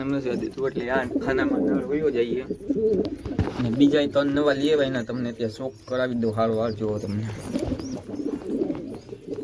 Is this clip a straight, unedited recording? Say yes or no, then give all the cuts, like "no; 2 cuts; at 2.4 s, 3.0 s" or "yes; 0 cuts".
yes; 0 cuts